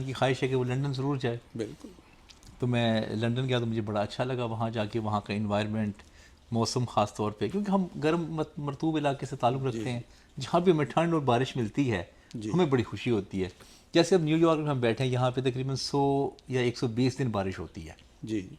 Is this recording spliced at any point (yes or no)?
no